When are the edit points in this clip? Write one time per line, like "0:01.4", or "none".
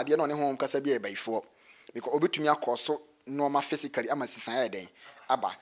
none